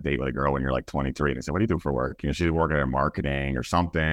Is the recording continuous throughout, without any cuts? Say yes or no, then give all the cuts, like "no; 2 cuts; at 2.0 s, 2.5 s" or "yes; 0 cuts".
yes; 0 cuts